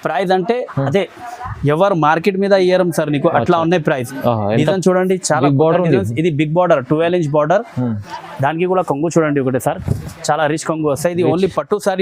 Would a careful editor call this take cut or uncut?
uncut